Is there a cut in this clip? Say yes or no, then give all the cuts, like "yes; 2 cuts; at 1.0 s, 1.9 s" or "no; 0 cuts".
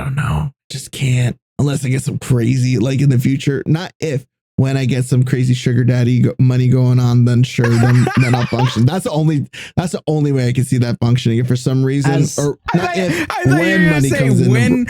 yes; 1 cut; at 1.4 s